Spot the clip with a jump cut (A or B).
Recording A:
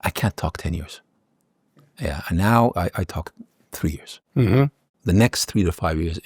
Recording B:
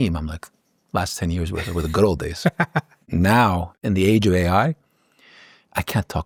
A